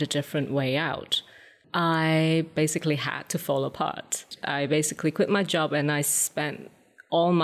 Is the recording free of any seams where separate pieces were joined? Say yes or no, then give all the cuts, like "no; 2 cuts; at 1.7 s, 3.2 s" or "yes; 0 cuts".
no; 3 cuts; at 1.5 s, 2.5 s, 4.3 s